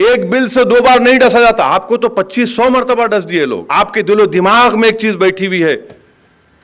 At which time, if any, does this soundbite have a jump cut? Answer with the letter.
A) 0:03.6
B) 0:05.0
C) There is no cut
A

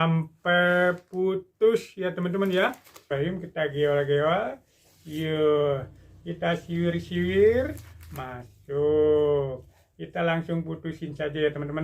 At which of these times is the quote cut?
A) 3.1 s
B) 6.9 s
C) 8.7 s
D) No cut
A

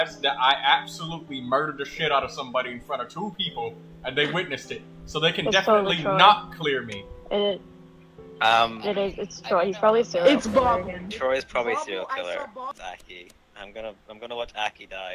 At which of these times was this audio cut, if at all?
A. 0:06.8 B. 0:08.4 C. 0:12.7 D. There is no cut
C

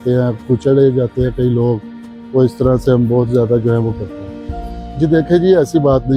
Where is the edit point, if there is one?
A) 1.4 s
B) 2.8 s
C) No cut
C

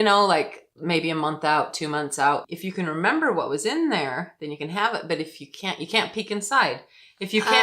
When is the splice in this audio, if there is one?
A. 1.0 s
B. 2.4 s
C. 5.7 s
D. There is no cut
B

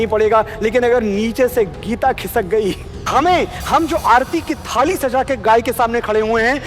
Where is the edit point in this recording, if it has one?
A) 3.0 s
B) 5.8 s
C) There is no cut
A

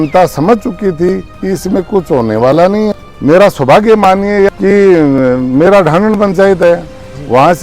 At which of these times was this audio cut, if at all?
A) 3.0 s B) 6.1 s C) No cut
A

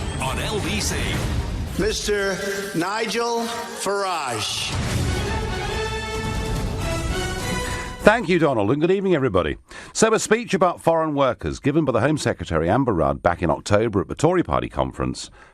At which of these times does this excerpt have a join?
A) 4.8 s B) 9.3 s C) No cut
B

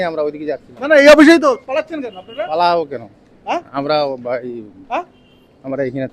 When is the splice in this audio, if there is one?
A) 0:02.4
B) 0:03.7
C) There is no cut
C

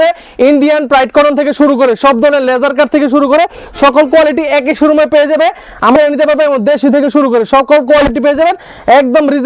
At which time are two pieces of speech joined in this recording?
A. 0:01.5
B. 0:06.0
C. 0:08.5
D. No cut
B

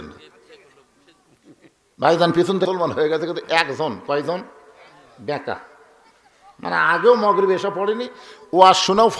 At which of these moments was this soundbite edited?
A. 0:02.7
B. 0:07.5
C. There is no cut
A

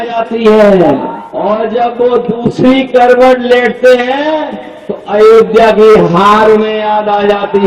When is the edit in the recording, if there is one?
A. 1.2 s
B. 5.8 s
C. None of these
A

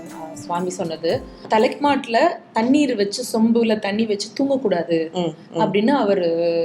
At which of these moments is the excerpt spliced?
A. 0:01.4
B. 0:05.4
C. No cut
A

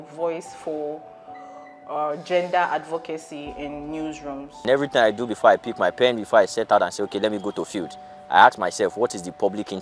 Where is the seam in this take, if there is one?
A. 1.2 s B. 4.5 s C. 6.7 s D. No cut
B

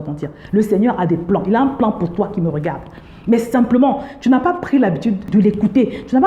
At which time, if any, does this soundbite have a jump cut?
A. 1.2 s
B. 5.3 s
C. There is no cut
B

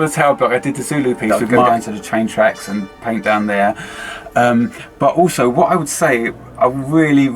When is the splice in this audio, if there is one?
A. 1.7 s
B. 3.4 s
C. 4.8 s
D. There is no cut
A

